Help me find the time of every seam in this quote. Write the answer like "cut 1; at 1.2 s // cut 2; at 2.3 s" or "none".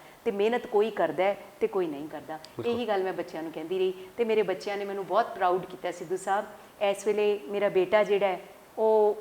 none